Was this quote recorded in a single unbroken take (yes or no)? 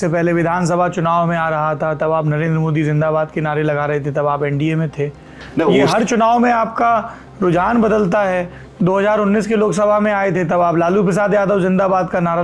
yes